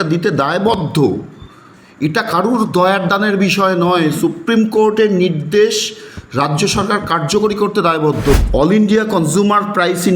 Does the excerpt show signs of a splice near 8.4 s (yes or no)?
yes